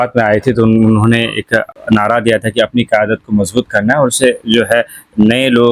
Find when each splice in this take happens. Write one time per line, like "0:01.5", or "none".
0:01.7